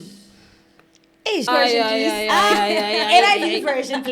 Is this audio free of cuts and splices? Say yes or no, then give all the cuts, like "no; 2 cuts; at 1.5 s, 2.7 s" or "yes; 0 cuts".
no; 1 cut; at 1.5 s